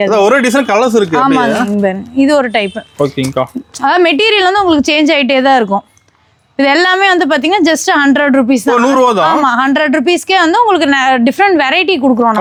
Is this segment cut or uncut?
uncut